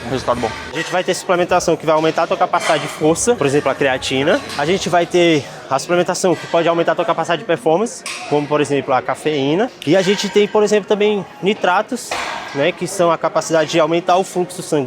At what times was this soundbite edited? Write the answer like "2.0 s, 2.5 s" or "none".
0.8 s, 3.4 s, 4.5 s, 9.8 s